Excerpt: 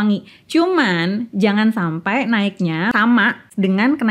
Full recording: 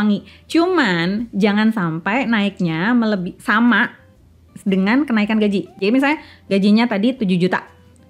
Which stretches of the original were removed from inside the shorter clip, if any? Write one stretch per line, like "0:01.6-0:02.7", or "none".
0:02.9-0:04.0